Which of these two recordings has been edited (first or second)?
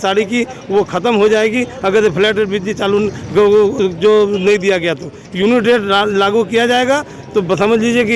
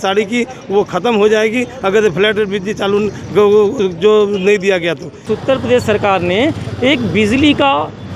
second